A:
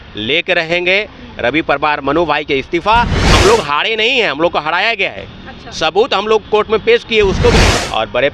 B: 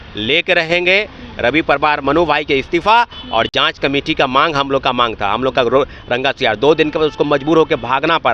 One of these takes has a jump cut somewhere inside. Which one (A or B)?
A